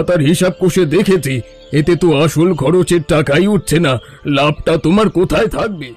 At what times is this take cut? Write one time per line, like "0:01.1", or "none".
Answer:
none